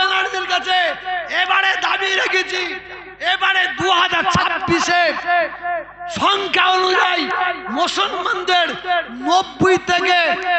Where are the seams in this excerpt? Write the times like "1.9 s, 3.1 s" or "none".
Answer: none